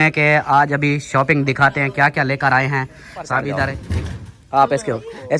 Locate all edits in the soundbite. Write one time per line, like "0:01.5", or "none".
0:03.8